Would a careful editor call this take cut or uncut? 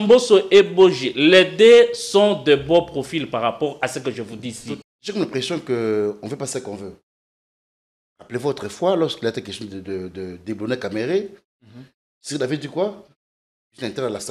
cut